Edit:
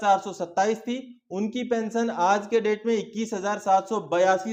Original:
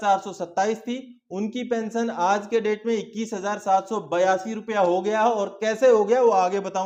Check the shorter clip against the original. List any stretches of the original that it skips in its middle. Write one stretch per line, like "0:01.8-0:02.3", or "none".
none

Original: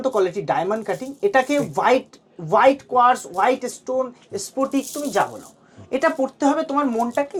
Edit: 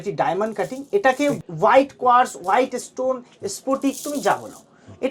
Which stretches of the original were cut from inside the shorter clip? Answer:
0:01.7-0:02.3

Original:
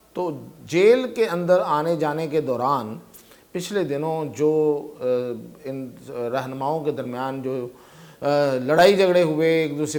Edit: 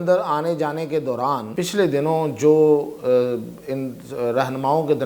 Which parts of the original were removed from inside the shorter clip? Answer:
0:02.9-0:03.5

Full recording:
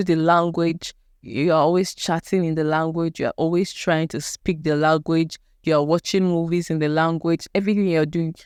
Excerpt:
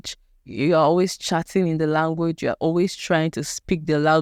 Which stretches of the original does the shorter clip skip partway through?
none

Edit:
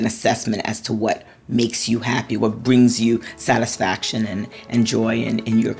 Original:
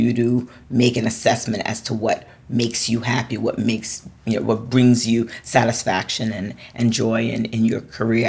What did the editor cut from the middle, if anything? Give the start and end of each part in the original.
0:03.4-0:04.5

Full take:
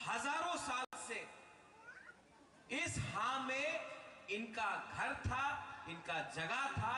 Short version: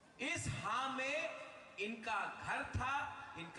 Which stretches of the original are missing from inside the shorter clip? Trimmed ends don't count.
none

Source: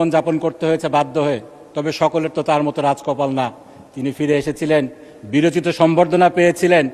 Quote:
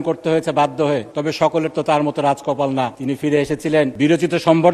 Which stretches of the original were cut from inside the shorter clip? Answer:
0:01.5-0:01.7
0:03.6-0:03.9
0:04.9-0:05.3

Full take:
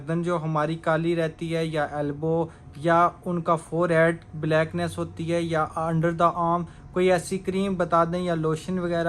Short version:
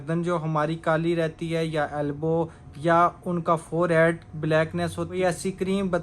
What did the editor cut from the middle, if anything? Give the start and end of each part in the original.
0:05.1-0:07.0

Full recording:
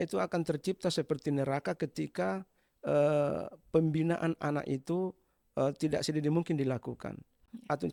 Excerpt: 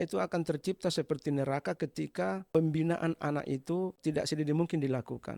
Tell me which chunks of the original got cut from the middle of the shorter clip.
0:02.4-0:03.6
0:05.2-0:05.8

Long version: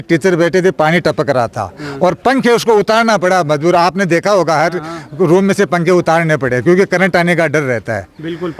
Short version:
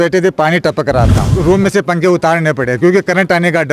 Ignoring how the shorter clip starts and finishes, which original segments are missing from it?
0:01.6-0:05.1

